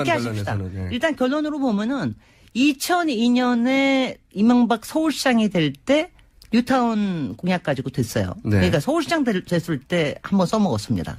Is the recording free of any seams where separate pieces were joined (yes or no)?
no